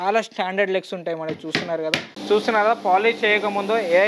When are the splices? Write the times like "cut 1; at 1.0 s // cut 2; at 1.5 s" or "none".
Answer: cut 1; at 2.1 s